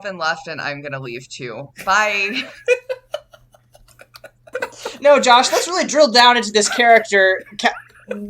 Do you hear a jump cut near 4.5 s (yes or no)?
yes